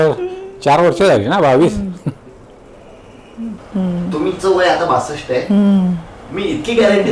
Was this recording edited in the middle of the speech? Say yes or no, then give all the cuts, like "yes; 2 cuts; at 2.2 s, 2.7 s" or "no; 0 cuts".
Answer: yes; 1 cut; at 3.5 s